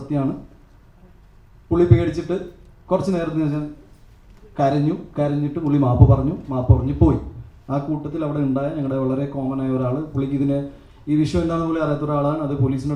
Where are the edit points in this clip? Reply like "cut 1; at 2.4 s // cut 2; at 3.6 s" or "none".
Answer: none